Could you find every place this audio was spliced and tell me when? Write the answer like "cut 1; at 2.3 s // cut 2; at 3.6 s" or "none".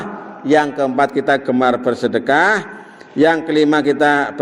none